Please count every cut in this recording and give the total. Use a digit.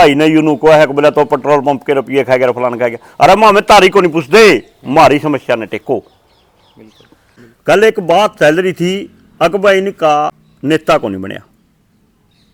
0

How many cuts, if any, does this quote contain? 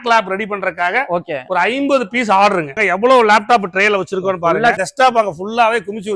2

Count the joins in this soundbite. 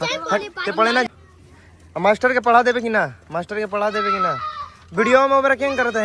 1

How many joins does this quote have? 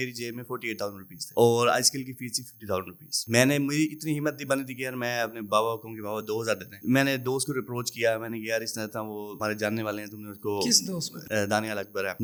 0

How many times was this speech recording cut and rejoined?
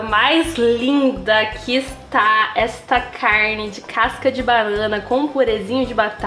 0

